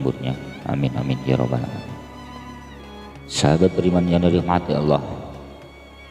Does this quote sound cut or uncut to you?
cut